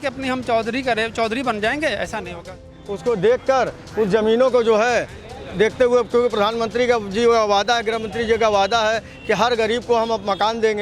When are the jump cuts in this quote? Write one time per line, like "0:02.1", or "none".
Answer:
0:02.7